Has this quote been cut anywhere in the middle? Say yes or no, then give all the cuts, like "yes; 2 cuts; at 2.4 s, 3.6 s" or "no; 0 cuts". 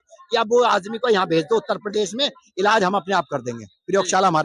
no; 0 cuts